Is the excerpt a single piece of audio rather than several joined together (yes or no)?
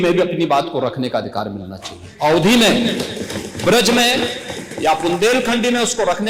yes